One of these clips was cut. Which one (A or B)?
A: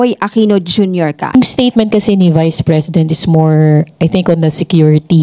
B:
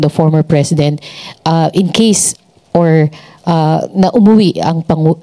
A